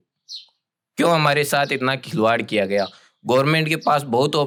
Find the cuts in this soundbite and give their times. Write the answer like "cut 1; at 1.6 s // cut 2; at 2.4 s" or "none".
none